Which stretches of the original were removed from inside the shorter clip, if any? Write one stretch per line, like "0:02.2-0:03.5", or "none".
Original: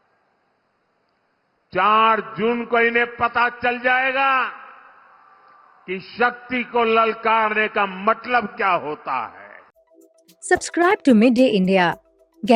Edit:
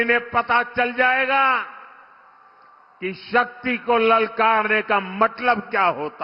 none